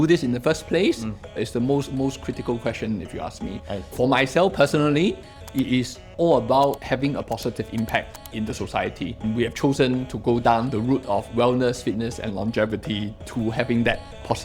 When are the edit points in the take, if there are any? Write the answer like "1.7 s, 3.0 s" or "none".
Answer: 6.0 s, 6.8 s